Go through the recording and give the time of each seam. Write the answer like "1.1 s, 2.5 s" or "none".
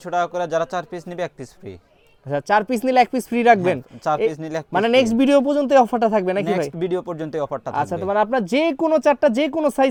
none

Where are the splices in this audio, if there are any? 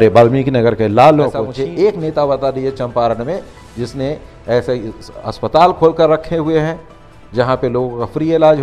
1.4 s

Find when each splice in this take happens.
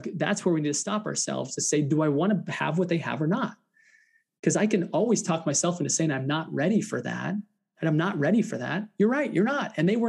none

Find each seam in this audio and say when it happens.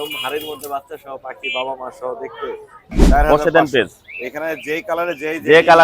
3.0 s

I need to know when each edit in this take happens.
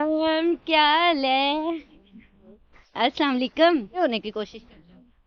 4.0 s

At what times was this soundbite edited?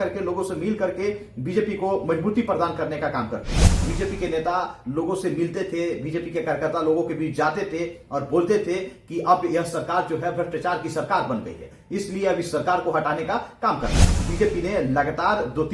3.9 s, 14.2 s

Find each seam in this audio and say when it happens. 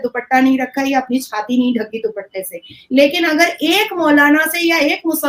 none

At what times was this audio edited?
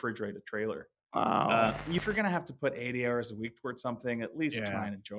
2.0 s

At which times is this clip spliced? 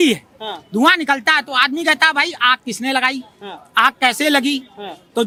none

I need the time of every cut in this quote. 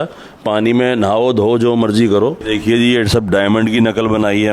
2.4 s

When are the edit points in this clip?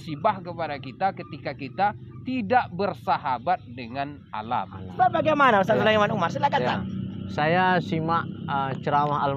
4.9 s

